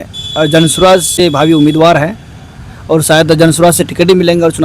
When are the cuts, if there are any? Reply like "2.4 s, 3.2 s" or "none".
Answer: 1.1 s